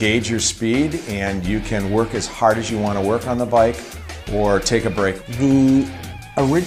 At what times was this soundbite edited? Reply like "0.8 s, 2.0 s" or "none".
2.8 s